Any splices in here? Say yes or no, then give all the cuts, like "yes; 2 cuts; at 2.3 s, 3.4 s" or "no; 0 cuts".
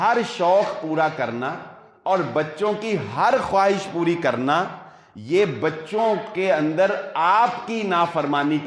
no; 0 cuts